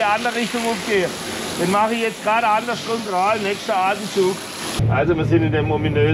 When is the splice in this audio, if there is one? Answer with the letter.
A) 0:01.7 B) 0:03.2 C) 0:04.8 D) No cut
C